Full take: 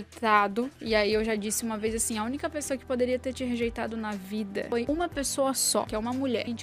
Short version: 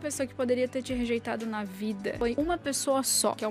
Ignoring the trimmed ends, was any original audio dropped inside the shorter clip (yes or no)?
no